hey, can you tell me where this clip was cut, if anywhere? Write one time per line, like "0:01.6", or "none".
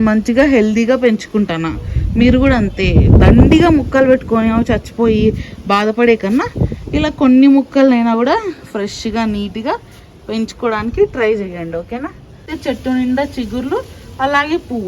0:12.5